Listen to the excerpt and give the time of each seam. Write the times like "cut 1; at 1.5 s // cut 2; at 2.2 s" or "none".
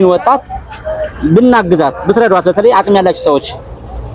none